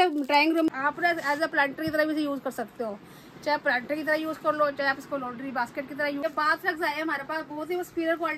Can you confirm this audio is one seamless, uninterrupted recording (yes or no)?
no